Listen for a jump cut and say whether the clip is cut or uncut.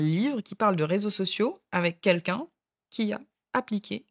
uncut